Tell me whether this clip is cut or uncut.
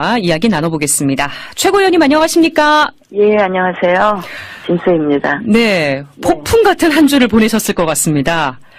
uncut